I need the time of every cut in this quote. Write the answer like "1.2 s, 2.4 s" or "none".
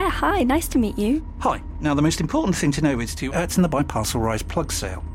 none